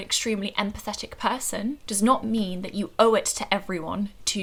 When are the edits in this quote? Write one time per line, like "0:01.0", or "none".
none